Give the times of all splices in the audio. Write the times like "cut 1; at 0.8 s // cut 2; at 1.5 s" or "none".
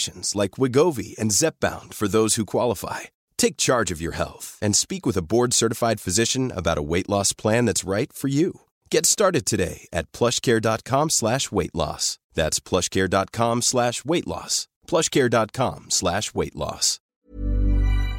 cut 1; at 17.0 s